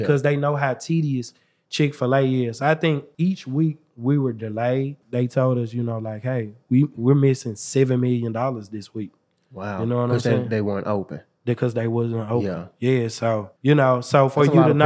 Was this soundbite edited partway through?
yes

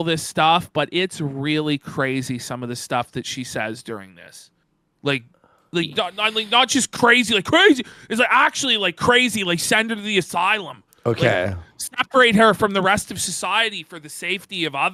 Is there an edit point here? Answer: no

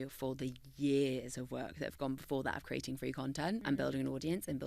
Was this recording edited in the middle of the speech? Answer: yes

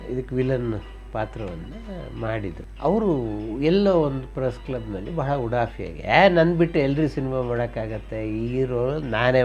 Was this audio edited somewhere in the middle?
yes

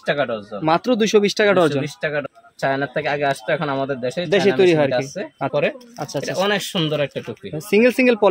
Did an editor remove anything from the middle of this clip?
yes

